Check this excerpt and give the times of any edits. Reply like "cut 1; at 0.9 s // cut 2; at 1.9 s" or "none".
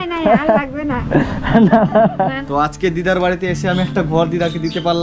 cut 1; at 2.4 s